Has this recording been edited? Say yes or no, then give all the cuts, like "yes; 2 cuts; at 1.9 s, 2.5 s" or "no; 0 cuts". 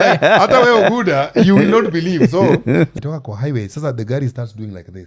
yes; 1 cut; at 2.9 s